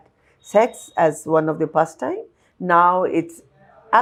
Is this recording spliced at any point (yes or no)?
no